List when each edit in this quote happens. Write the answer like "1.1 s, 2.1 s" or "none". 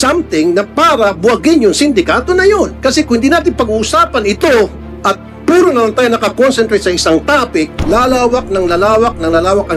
2.7 s, 4.9 s, 7.8 s